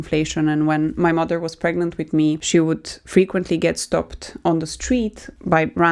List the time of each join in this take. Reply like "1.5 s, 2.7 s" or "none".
2.4 s

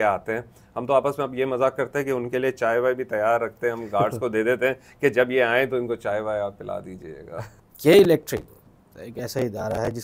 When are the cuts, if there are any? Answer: 7.4 s

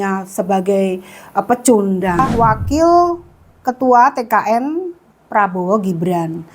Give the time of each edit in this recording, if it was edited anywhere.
2.3 s

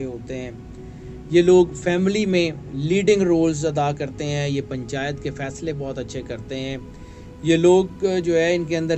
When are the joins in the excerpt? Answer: none

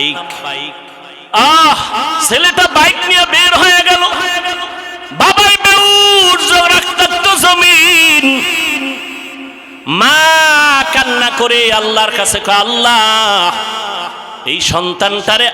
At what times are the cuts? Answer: 1.2 s

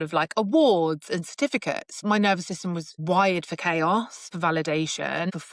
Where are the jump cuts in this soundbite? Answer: 1.9 s, 4.3 s

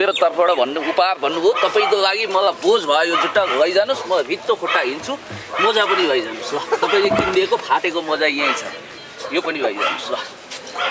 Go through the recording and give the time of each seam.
none

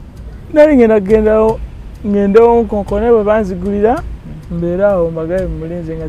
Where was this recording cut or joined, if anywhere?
none

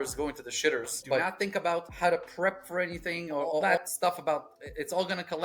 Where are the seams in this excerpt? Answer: 1.2 s, 3.6 s

